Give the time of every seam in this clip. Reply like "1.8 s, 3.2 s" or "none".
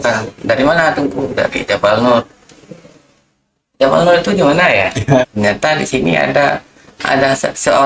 5.2 s